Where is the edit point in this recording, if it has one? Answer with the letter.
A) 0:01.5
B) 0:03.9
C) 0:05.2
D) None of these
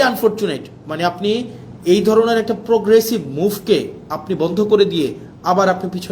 D